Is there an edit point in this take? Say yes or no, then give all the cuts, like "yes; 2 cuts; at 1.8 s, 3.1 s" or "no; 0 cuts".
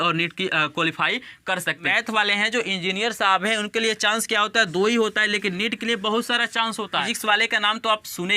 yes; 2 cuts; at 1.9 s, 7.2 s